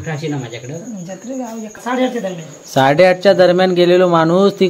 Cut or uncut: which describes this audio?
cut